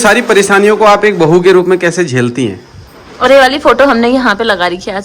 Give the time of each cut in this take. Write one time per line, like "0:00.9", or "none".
0:03.1